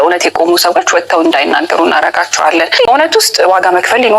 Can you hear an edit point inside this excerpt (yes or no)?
yes